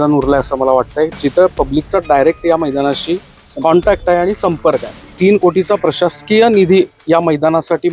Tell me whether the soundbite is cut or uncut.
cut